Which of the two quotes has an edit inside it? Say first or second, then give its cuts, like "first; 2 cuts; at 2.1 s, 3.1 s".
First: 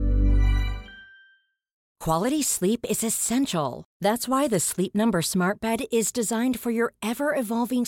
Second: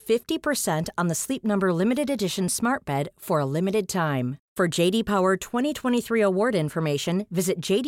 first; 1 cut; at 1.8 s